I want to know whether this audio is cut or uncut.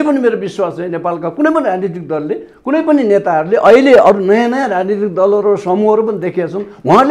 uncut